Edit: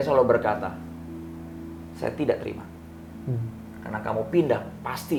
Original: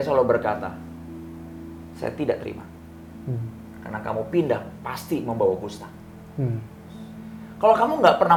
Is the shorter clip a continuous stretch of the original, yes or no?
yes